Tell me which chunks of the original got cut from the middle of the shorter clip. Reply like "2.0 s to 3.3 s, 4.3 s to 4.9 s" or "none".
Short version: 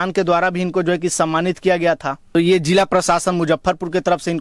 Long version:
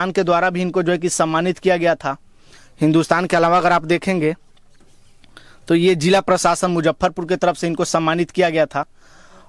2.2 s to 5.6 s